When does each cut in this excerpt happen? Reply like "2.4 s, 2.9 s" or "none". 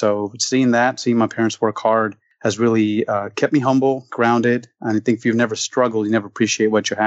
2.2 s